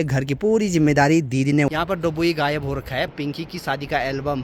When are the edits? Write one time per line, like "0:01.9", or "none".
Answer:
0:01.7
0:03.1